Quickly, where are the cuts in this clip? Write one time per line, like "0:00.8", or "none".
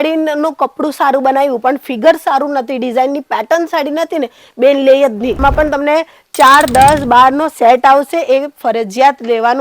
0:05.4